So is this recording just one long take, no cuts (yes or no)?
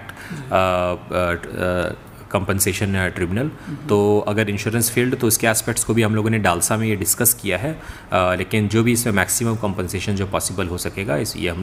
yes